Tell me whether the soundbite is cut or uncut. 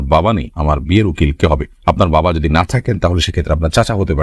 uncut